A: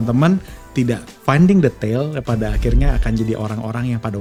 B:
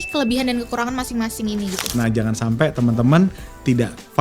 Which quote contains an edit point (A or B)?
B